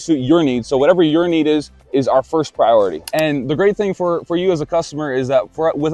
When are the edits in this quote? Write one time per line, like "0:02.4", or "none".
0:03.0